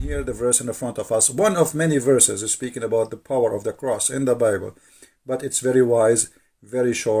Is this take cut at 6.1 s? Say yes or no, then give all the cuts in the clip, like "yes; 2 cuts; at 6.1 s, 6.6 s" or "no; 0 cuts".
no; 0 cuts